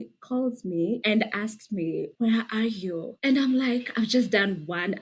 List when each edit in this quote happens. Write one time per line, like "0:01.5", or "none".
0:01.0